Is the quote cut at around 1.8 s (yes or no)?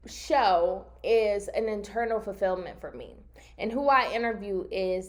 no